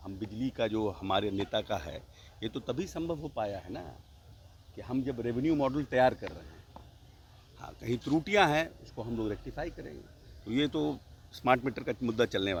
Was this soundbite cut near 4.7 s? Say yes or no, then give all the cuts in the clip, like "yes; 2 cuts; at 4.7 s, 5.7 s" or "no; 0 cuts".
no; 0 cuts